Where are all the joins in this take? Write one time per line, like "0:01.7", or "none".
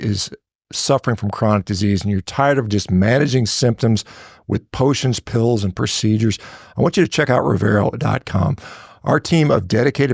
none